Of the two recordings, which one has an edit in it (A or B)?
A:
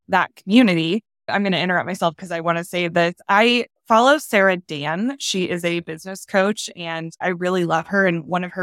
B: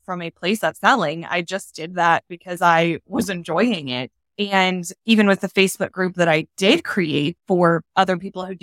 B